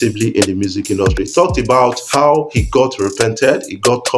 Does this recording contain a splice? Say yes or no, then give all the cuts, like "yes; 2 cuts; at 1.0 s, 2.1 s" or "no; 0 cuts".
yes; 1 cut; at 2.0 s